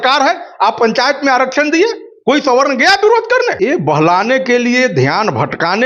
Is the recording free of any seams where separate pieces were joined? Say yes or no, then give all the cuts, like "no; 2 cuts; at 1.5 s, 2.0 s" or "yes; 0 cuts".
no; 1 cut; at 3.5 s